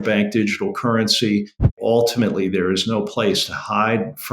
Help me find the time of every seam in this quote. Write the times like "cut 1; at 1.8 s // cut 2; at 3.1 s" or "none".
cut 1; at 1.7 s